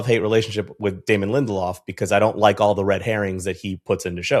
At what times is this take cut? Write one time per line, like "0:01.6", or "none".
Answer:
none